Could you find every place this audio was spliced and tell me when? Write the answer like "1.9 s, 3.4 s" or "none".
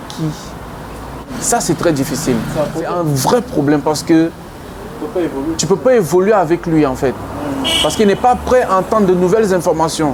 1.3 s, 2.9 s